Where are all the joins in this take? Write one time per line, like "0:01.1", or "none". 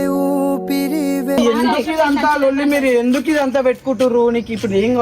0:01.4